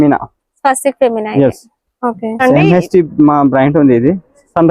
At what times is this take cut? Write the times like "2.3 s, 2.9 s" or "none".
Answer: 2.4 s

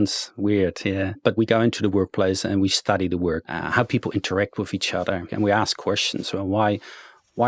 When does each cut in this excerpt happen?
1.4 s, 3.4 s, 5.3 s

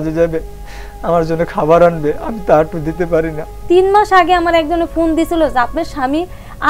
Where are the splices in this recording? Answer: 3.6 s

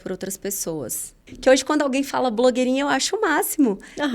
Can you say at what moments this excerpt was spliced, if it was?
1.2 s

